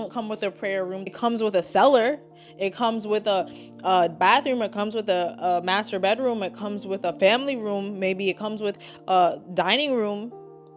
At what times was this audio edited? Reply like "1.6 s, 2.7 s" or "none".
1.0 s